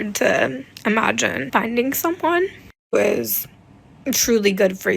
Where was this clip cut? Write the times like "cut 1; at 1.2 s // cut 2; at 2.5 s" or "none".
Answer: cut 1; at 1.4 s

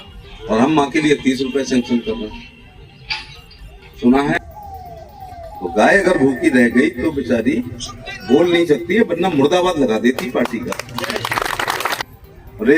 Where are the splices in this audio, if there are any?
cut 1; at 4.4 s // cut 2; at 12.0 s

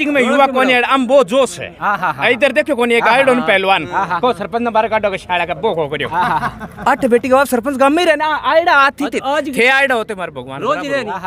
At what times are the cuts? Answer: none

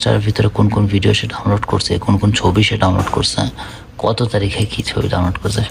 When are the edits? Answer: none

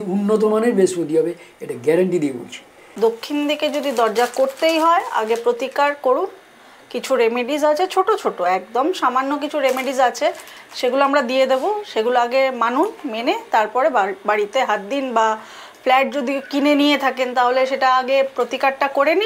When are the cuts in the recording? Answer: cut 1; at 2.8 s

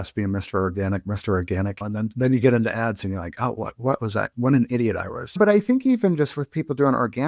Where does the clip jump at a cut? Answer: cut 1; at 1.8 s // cut 2; at 5.4 s

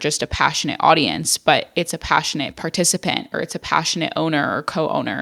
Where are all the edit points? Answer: none

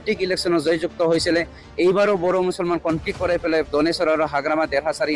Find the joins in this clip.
none

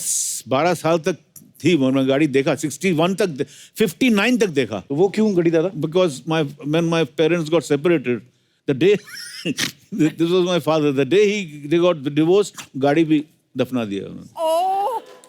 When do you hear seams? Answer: cut 1; at 4.8 s

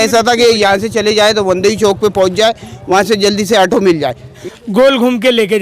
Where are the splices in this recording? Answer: cut 1; at 4.4 s

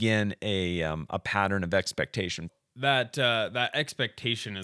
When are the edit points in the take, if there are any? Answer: cut 1; at 2.5 s

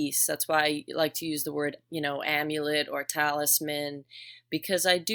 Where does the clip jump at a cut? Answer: none

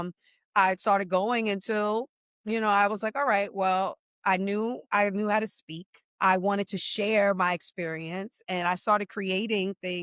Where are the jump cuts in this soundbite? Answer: cut 1; at 4.8 s // cut 2; at 6.2 s

